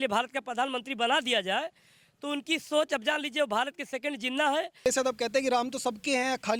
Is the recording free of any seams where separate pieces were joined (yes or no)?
no